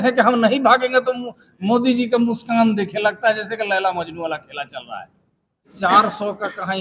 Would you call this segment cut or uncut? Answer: cut